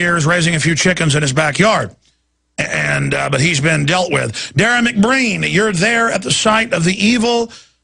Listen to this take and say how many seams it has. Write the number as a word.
zero